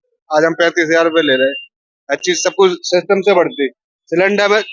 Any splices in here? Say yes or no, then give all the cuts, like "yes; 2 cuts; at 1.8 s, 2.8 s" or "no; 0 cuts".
no; 0 cuts